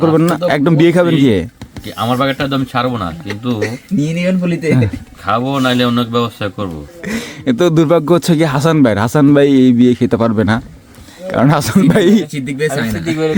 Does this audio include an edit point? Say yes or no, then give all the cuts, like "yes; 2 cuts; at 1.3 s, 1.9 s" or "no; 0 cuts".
yes; 1 cut; at 6.9 s